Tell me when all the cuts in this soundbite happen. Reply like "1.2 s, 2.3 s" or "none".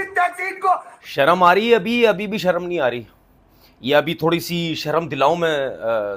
1.0 s